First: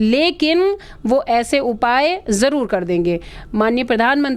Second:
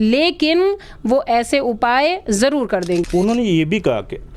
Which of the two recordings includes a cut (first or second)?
second